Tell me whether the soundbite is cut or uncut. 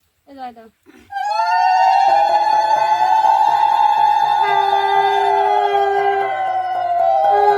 uncut